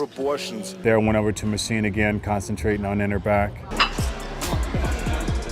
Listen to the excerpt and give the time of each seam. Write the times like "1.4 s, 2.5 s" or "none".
0.8 s, 3.6 s

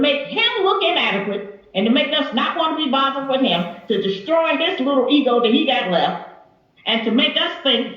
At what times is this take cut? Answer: 4.2 s

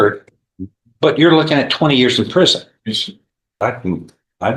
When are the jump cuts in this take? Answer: 3.6 s

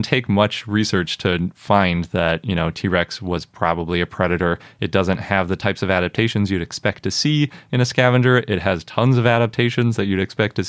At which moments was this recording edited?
none

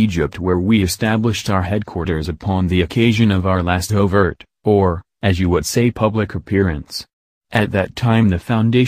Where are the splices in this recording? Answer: 5.7 s

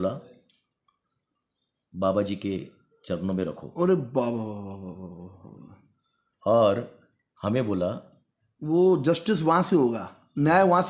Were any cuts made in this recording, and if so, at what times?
none

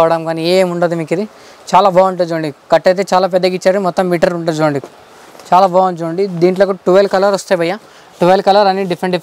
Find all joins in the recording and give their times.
none

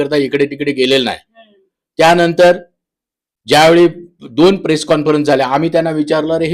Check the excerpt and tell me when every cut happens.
none

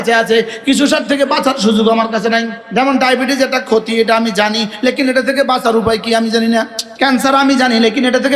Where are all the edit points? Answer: 2.6 s, 6.8 s

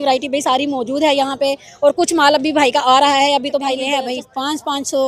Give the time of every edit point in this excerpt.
3.9 s

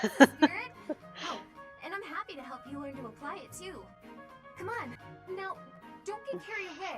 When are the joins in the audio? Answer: 5.0 s

